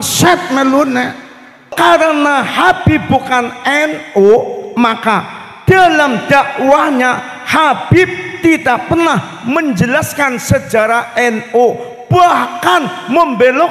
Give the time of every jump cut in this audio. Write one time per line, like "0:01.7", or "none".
0:01.7